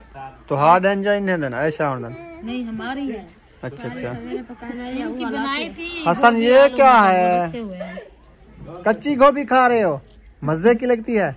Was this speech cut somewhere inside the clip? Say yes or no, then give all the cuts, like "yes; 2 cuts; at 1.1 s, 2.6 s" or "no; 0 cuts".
no; 0 cuts